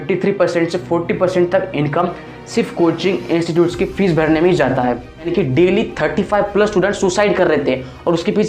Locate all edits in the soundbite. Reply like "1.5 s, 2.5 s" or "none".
5.3 s